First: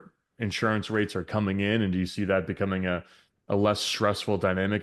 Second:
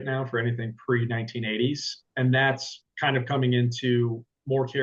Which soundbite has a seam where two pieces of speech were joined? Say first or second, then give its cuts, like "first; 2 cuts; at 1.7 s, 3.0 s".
second; 1 cut; at 2.1 s